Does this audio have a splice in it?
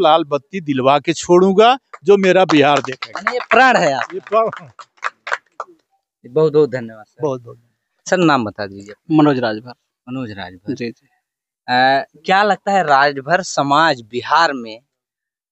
no; 0 cuts

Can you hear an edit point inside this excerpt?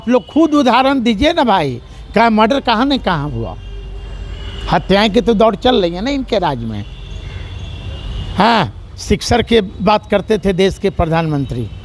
no; 0 cuts

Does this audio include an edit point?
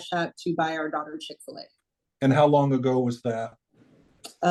no; 0 cuts

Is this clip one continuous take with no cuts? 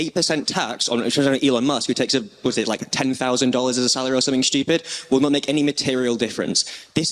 yes; 0 cuts

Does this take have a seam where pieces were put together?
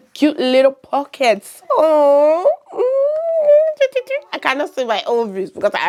no; 0 cuts

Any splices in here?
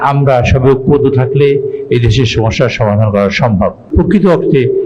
yes; 1 cut; at 3.8 s

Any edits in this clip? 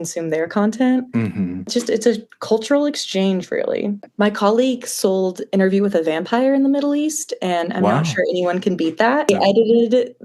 yes; 3 cuts; at 1.7 s, 4.1 s, 9.3 s

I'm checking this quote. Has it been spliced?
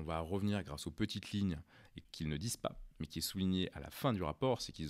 yes; 1 cut; at 2.0 s

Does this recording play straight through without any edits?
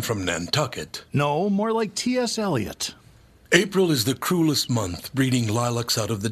yes; 0 cuts

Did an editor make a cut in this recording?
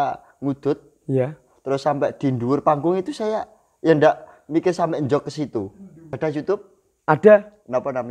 yes; 1 cut; at 6.1 s

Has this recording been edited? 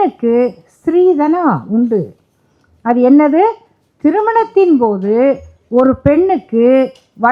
no; 0 cuts

